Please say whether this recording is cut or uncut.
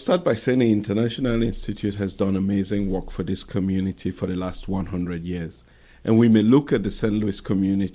uncut